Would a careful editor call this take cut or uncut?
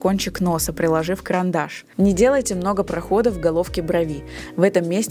cut